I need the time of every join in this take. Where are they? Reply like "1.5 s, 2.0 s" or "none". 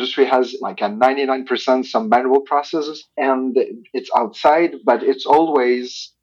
none